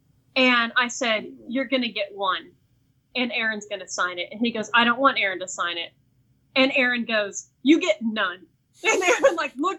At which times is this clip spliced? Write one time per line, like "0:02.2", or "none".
none